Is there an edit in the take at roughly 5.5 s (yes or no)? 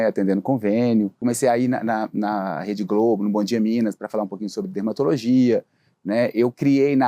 no